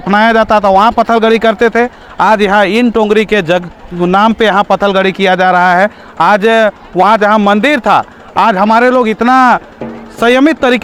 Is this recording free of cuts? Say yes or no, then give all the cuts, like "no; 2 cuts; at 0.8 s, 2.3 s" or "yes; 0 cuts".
yes; 0 cuts